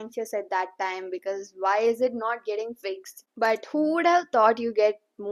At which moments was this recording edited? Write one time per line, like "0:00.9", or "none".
0:03.2